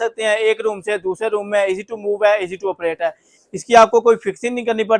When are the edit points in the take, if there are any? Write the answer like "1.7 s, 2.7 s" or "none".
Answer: none